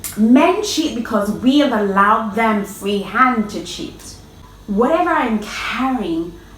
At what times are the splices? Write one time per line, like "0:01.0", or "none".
0:04.4